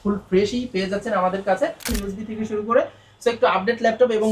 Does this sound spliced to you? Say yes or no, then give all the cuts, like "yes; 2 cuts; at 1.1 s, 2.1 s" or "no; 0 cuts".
yes; 1 cut; at 1.9 s